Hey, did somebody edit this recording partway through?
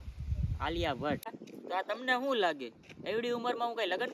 yes; 1 cut; at 1.4 s

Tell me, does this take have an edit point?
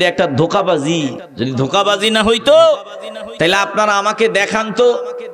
yes; 1 cut; at 1.2 s

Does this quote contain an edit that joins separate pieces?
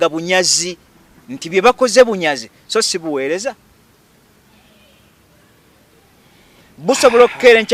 no; 0 cuts

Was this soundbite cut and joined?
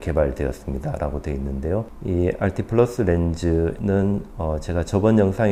no; 0 cuts

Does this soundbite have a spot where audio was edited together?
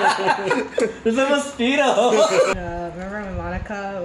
yes; 1 cut; at 2.5 s

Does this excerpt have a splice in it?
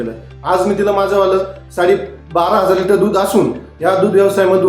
yes; 1 cut; at 3.7 s

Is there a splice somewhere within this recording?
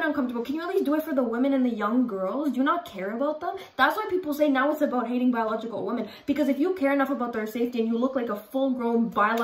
no; 0 cuts

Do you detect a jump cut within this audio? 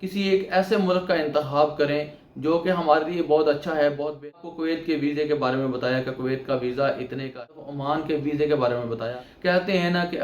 yes; 3 cuts; at 4.4 s, 7.3 s, 9.1 s

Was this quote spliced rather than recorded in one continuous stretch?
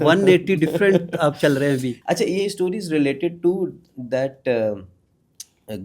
yes; 1 cut; at 1.9 s

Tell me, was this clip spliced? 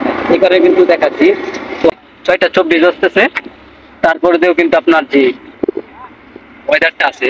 yes; 1 cut; at 1.9 s

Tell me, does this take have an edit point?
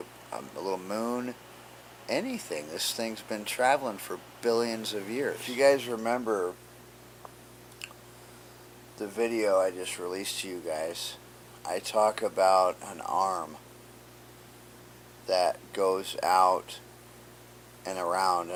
no; 0 cuts

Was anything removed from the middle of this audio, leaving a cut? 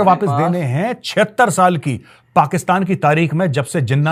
no; 0 cuts

